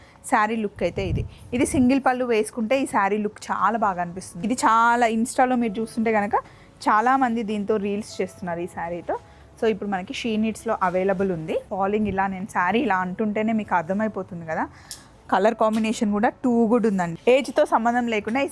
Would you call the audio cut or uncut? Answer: cut